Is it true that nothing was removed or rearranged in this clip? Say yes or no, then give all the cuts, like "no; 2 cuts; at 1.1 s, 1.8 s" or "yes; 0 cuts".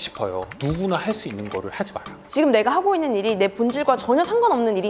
no; 1 cut; at 2.2 s